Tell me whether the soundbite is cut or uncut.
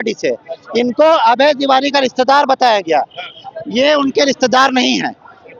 uncut